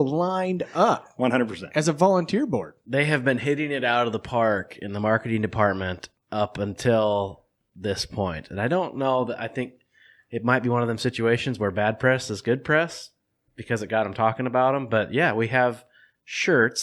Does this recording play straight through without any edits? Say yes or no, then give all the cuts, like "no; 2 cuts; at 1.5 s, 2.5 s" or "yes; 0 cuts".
yes; 0 cuts